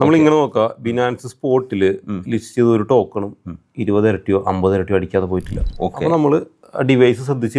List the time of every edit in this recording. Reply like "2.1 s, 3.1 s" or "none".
5.6 s